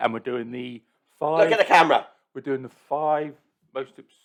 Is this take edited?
no; 0 cuts

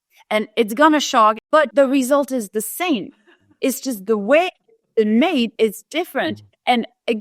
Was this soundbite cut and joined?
yes; 1 cut; at 1.5 s

